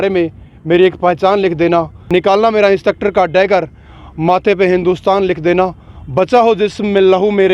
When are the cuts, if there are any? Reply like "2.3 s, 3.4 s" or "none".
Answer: 2.0 s